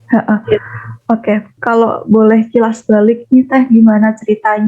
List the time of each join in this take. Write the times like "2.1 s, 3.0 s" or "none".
1.5 s